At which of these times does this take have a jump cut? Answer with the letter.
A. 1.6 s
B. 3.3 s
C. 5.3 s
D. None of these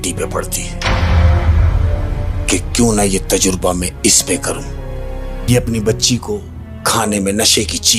C